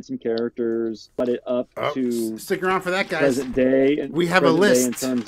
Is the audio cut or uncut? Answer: cut